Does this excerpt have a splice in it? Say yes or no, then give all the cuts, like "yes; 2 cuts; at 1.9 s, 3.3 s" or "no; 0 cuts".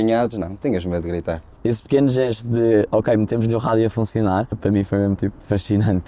yes; 2 cuts; at 1.5 s, 4.9 s